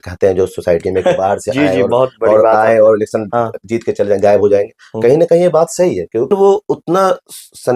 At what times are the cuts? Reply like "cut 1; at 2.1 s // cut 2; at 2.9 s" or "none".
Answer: cut 1; at 6.3 s